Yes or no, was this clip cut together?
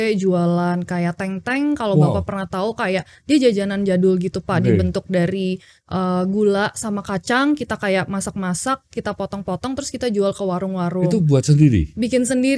no